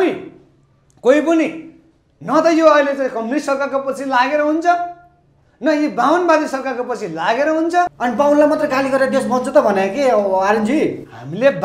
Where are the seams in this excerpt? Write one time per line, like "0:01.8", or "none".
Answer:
0:07.9